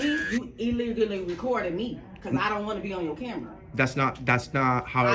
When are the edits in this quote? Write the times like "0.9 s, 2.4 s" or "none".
none